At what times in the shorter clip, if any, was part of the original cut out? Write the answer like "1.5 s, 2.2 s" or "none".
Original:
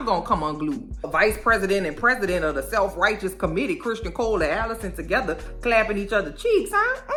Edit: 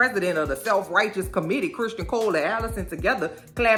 none